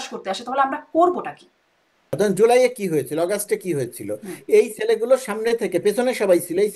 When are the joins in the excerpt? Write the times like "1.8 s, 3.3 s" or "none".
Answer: 2.1 s